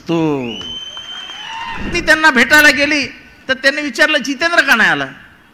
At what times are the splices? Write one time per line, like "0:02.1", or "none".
0:01.9

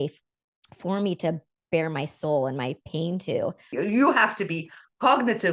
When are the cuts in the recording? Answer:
0:03.6

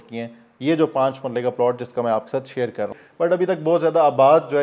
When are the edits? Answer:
0:03.0

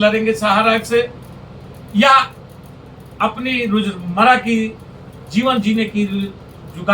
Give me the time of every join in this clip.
none

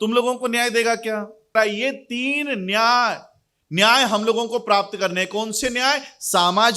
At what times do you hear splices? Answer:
0:01.5

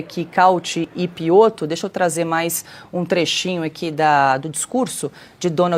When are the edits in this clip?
none

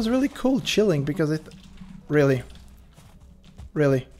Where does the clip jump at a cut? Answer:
none

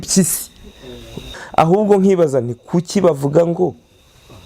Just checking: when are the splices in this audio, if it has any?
0:01.3

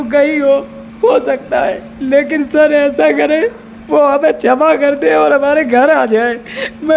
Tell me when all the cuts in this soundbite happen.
none

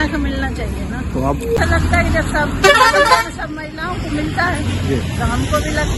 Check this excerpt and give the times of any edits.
0:01.6

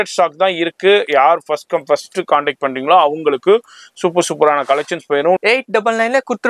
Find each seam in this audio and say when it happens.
0:05.4

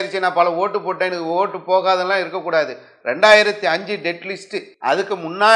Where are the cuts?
0:04.6

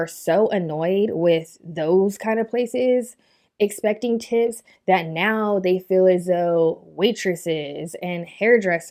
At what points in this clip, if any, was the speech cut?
none

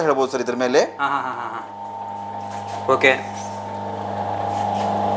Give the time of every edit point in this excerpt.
none

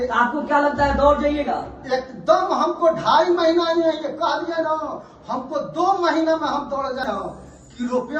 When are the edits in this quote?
0:07.0

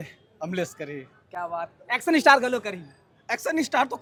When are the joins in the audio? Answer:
none

